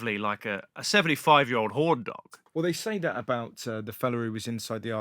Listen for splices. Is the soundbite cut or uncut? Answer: cut